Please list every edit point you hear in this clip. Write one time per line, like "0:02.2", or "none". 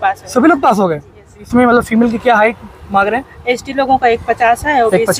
0:01.5

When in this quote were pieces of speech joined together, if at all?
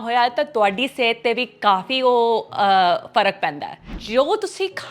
0:04.0

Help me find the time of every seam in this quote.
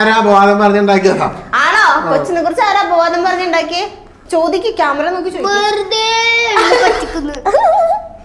none

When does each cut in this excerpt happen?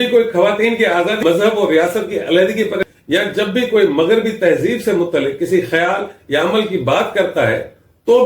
0:01.2
0:02.8

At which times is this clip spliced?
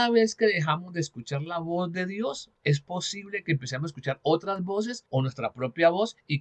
0:02.5
0:05.0

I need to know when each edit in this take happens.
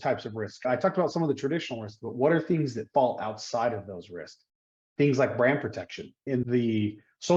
none

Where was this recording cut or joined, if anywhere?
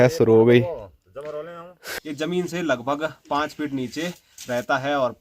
0:01.9

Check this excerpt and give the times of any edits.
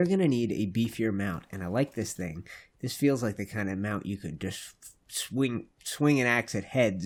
none

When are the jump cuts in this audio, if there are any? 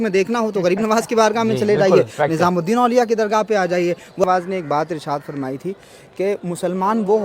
0:04.2

